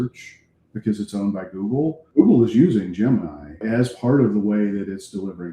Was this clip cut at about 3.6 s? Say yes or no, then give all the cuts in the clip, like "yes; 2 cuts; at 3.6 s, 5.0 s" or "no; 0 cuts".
yes; 2 cuts; at 2.0 s, 3.6 s